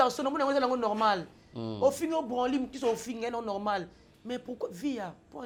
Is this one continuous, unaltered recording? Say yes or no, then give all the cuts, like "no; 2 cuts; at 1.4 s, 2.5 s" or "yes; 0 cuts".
yes; 0 cuts